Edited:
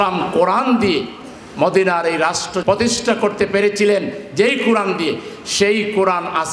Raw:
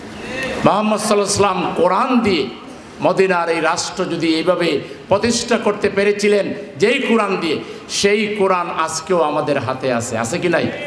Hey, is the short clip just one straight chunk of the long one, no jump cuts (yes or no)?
no